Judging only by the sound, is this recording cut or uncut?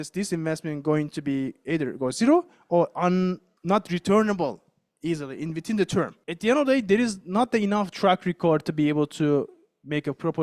cut